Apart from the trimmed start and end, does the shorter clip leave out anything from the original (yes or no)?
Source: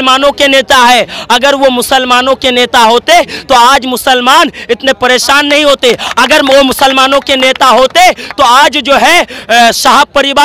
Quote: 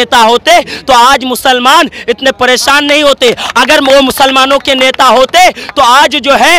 no